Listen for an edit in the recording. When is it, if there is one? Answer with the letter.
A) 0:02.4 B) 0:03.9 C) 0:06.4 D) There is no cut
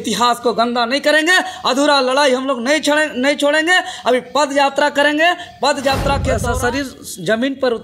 C